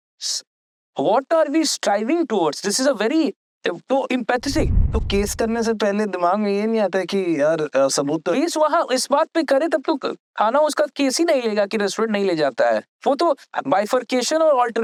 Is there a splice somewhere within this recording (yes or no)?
no